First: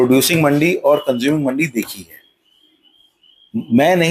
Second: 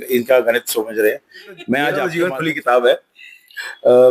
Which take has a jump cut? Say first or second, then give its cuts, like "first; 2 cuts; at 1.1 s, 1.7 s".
second; 1 cut; at 2.1 s